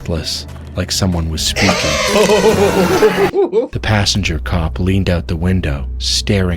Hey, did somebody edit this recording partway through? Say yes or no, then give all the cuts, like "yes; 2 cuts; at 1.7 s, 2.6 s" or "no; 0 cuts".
yes; 1 cut; at 3.7 s